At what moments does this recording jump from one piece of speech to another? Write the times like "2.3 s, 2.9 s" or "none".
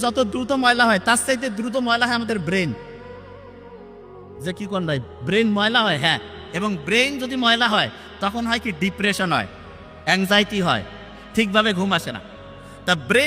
none